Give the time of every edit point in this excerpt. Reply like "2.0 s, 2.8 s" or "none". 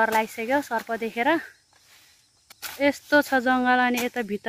none

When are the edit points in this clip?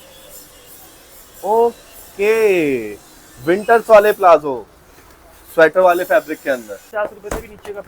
6.9 s

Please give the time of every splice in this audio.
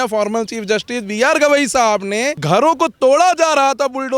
2.4 s

